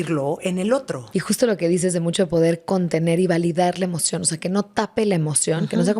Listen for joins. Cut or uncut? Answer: cut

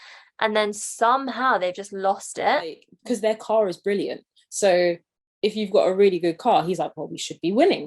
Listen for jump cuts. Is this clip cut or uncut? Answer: cut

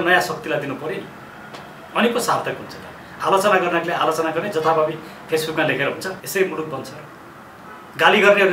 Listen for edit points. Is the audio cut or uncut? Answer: cut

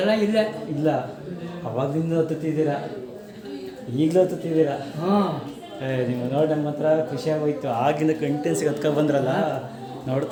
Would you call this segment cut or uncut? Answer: uncut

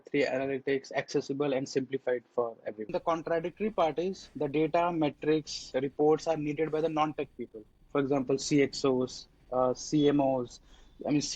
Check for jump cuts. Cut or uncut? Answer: cut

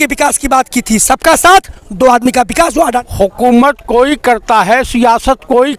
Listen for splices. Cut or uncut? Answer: cut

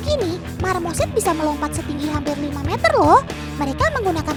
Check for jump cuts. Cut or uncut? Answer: uncut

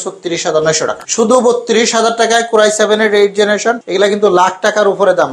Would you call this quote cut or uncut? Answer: cut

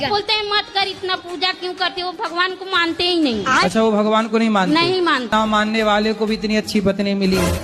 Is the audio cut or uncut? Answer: cut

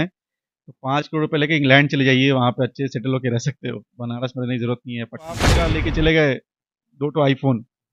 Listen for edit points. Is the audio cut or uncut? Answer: cut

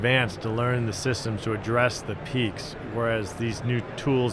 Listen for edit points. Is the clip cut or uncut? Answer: uncut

